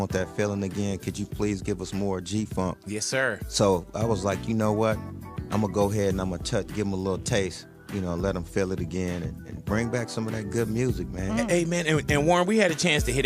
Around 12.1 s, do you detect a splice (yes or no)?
no